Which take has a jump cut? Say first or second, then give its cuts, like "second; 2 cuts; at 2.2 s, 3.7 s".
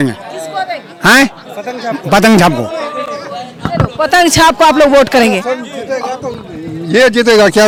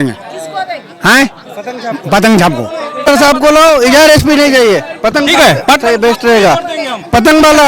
second; 1 cut; at 3.0 s